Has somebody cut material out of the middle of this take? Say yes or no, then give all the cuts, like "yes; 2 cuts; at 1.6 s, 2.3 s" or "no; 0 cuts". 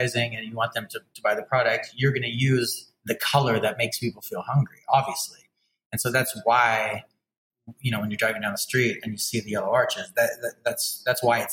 no; 0 cuts